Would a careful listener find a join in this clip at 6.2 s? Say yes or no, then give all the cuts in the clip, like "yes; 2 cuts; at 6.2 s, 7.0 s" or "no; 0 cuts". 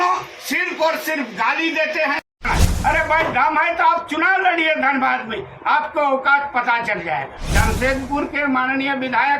no; 2 cuts; at 2.5 s, 7.4 s